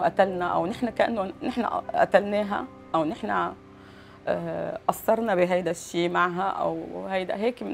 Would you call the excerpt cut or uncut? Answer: uncut